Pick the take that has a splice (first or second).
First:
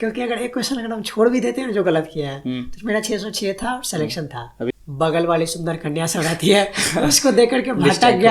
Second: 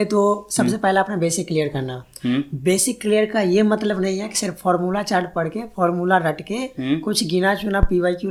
first